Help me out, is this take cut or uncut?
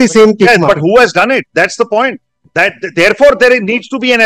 uncut